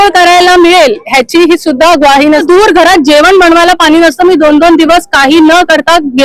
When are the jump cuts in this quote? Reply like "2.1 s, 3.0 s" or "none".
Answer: 2.4 s